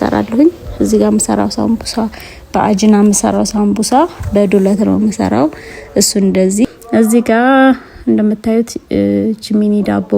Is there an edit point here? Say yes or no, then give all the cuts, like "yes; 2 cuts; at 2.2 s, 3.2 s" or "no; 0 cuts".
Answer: yes; 1 cut; at 6.7 s